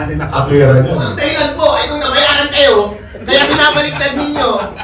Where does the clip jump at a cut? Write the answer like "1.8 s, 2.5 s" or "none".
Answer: 1.1 s